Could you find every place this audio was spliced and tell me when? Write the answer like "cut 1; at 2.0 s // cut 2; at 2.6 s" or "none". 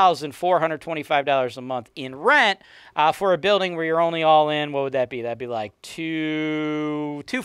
none

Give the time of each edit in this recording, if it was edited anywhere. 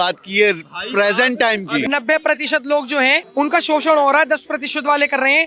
cut 1; at 1.9 s // cut 2; at 3.2 s

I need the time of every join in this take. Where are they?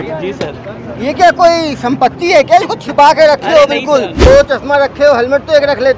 cut 1; at 4.1 s

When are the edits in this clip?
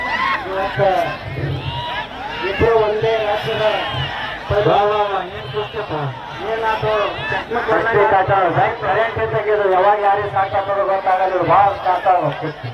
none

